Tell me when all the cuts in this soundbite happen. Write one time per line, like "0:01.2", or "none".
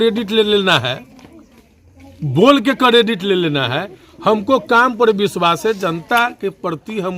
none